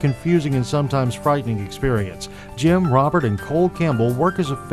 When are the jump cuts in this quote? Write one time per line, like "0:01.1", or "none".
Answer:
none